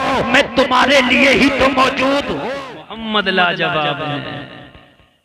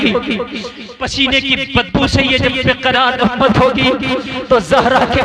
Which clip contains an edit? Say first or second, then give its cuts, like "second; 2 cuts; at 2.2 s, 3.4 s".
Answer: first; 1 cut; at 2.4 s